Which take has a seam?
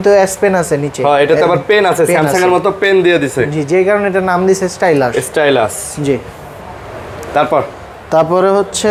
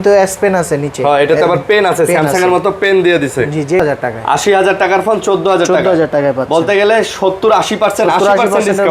second; 1 cut; at 3.8 s

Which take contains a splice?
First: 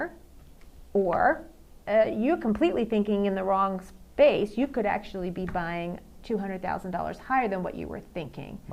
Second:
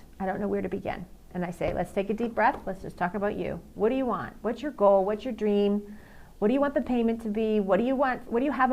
second; 1 cut; at 1.3 s

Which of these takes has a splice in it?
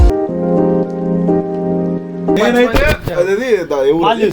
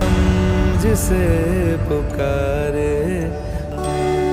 first; 1 cut; at 2.4 s

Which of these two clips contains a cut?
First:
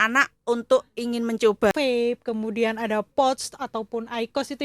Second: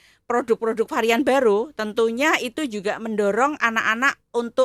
first; 1 cut; at 1.7 s

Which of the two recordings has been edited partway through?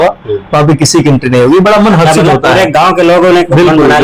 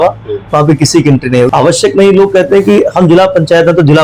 second; 1 cut; at 1.5 s

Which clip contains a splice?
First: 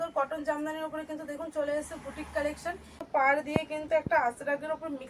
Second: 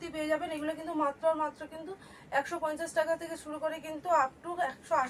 first; 1 cut; at 3.0 s

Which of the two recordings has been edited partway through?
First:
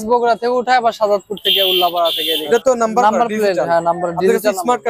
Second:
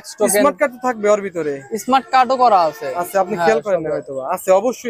first; 1 cut; at 2.4 s

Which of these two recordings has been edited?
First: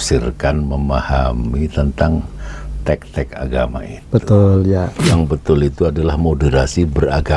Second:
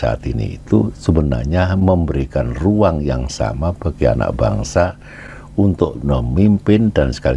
first; 1 cut; at 5.0 s

